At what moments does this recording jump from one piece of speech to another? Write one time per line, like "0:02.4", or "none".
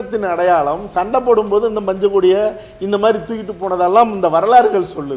none